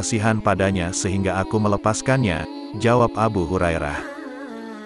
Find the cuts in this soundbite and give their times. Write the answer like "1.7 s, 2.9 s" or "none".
3.9 s